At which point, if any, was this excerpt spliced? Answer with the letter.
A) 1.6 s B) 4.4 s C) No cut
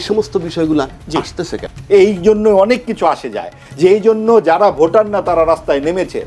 A